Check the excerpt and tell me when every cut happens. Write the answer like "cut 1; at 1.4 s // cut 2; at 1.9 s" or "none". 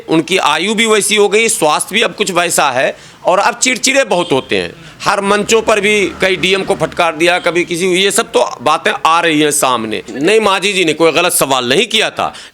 cut 1; at 10.1 s